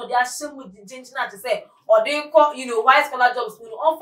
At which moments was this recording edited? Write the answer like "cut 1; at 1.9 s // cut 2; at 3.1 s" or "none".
none

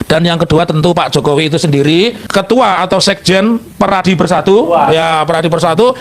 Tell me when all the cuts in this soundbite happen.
cut 1; at 2.2 s

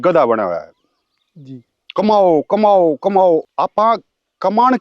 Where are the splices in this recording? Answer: cut 1; at 3.4 s

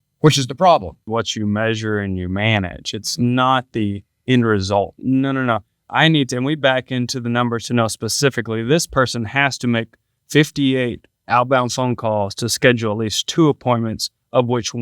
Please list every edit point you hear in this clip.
cut 1; at 1.0 s // cut 2; at 5.0 s

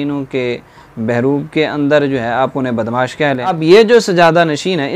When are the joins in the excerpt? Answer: cut 1; at 3.5 s

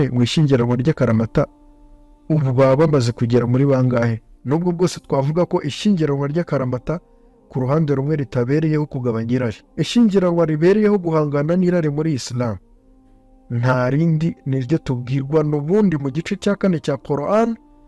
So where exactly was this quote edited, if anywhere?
cut 1; at 4.3 s // cut 2; at 9.6 s

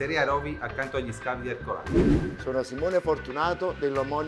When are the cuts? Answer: cut 1; at 1.8 s // cut 2; at 2.4 s

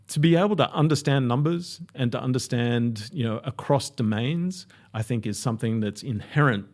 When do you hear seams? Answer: none

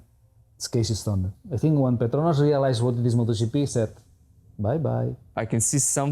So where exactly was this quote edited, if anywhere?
cut 1; at 1.3 s // cut 2; at 5.2 s

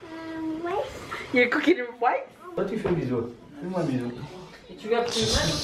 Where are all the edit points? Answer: cut 1; at 2.6 s

